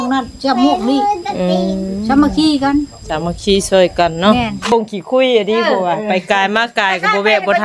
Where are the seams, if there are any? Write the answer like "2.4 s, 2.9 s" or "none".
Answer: 4.7 s